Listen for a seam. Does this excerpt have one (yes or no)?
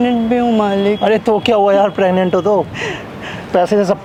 no